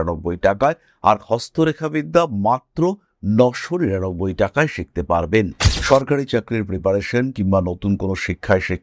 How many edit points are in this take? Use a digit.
1